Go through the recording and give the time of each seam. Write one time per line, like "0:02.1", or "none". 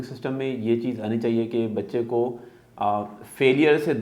none

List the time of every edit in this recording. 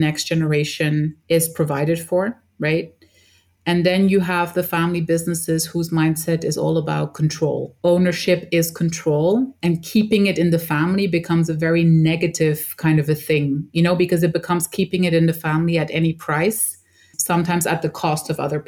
0:07.7
0:17.2

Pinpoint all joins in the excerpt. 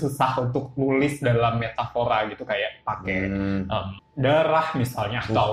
0:03.9

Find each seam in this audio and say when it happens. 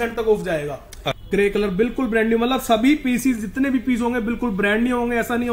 0:01.2

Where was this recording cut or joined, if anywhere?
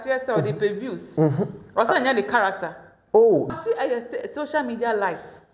0:03.5

